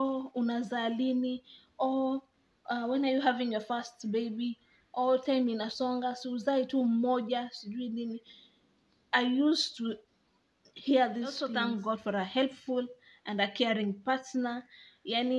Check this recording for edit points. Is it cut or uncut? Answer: cut